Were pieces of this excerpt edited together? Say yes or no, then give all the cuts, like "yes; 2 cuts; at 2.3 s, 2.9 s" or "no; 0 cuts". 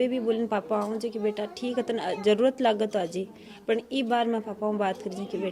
no; 0 cuts